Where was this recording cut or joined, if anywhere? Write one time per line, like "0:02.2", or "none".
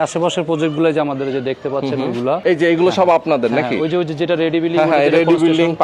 0:02.4